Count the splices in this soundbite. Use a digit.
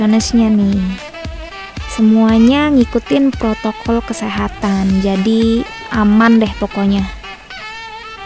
1